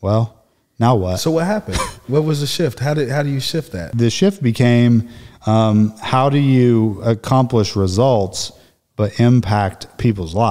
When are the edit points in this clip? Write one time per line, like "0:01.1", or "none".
0:03.9